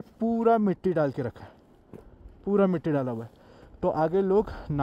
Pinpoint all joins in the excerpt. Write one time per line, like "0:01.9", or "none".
none